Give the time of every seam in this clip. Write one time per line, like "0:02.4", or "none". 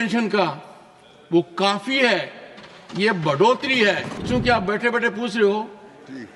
0:04.2